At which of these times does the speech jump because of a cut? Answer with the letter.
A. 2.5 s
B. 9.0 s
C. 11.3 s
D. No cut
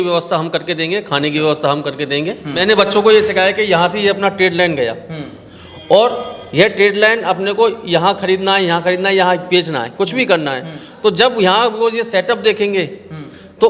A